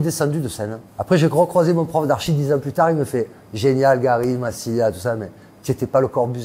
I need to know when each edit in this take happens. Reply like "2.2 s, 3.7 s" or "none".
none